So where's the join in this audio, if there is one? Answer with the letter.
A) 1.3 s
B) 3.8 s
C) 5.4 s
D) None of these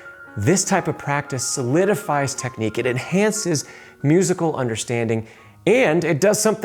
D